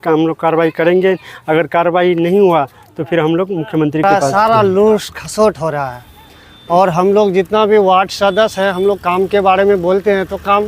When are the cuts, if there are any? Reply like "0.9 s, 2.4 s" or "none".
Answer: 4.0 s